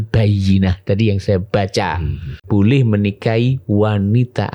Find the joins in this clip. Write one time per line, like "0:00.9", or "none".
0:02.3